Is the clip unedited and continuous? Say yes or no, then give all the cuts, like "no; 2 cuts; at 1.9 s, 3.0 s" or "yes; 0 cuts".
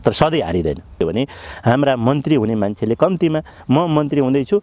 no; 1 cut; at 0.9 s